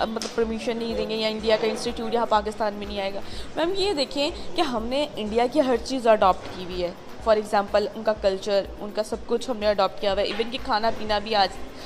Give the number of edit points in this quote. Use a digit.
0